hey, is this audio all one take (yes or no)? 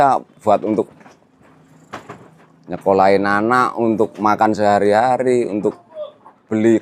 yes